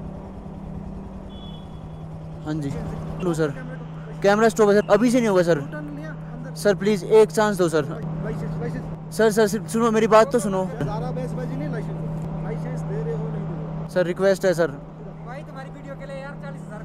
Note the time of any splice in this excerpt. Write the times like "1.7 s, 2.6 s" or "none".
3.2 s, 8.0 s, 10.9 s